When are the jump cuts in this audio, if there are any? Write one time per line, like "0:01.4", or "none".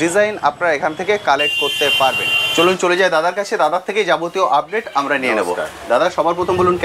none